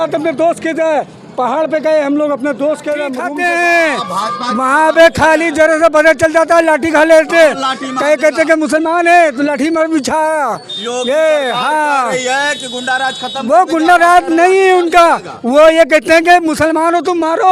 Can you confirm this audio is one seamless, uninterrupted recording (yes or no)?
no